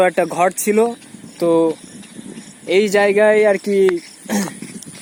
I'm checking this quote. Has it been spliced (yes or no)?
no